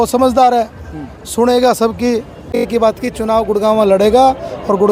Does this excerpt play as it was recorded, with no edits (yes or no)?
no